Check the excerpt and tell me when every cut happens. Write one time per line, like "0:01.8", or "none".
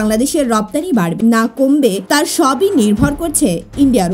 0:01.1
0:02.0